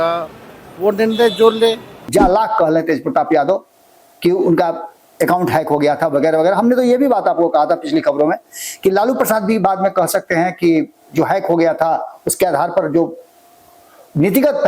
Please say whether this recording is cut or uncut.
cut